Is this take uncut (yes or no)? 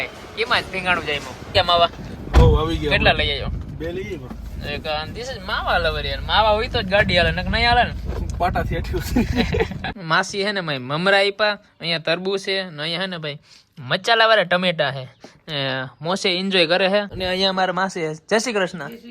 no